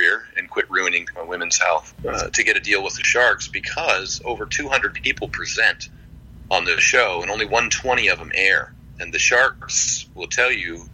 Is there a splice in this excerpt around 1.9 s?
yes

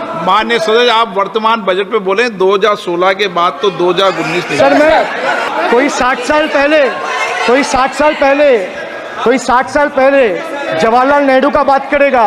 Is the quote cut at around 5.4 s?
yes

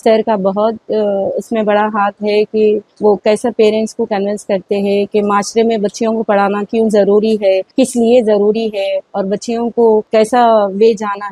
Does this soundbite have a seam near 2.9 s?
yes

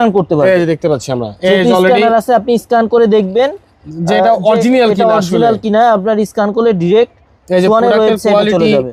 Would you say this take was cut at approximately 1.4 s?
no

